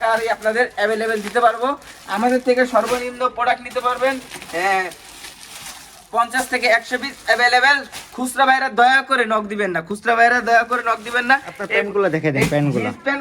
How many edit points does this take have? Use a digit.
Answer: 0